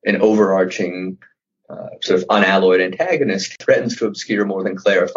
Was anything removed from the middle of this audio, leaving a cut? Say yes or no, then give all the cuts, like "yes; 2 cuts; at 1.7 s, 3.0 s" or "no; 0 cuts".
yes; 1 cut; at 3.6 s